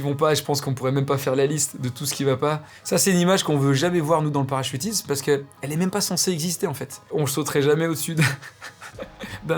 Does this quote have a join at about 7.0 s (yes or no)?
yes